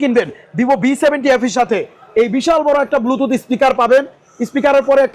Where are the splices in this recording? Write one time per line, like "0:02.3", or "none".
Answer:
none